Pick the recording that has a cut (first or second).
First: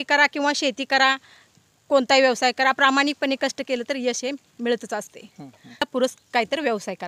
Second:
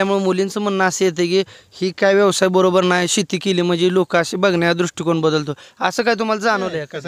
first